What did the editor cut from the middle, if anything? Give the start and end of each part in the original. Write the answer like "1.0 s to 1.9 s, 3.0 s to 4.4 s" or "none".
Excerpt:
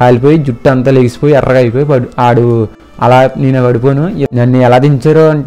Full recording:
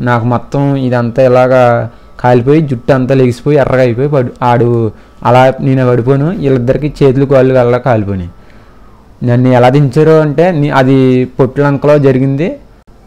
6.5 s to 9.2 s